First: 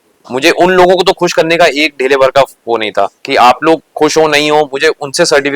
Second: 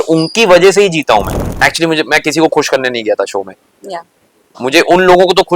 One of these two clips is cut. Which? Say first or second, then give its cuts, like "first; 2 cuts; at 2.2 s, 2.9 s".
second; 1 cut; at 1.3 s